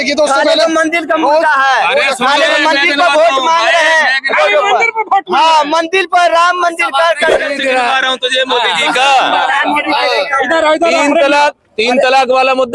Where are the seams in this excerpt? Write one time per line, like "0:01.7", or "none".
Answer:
0:07.5